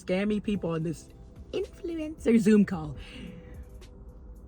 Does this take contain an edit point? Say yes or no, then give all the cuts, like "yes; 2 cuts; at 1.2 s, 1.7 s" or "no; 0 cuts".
no; 0 cuts